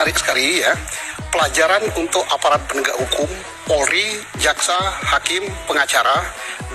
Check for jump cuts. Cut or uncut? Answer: uncut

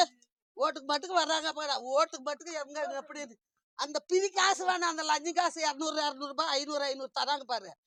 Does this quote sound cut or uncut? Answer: uncut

